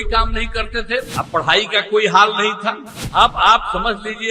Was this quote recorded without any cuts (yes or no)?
no